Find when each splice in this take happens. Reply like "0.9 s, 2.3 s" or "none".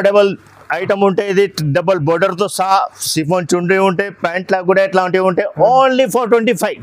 none